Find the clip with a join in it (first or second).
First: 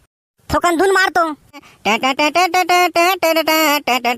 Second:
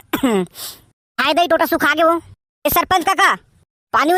first